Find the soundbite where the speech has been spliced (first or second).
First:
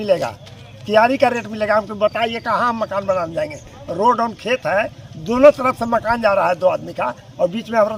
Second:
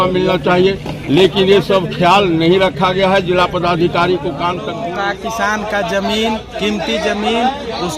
second